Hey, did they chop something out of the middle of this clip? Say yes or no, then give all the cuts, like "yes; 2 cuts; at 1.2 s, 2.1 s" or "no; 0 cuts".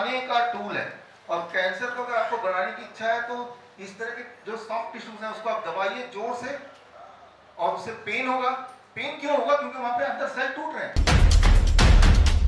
yes; 1 cut; at 10.9 s